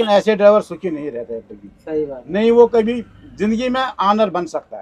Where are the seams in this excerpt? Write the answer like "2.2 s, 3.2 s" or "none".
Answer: none